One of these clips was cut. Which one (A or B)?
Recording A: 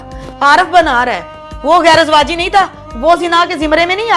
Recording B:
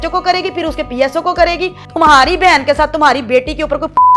B